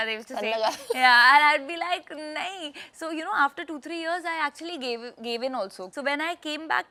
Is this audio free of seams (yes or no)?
yes